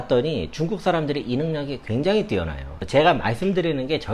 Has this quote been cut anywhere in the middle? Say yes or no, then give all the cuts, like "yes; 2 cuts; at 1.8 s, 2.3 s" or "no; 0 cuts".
yes; 1 cut; at 2.7 s